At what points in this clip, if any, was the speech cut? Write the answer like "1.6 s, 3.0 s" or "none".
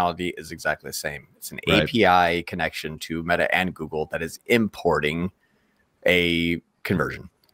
none